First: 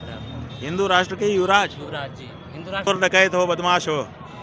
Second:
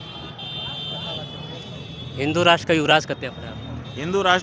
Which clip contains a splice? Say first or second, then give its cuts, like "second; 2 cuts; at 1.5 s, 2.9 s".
first; 1 cut; at 2.9 s